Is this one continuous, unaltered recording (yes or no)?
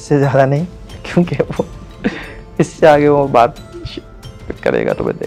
yes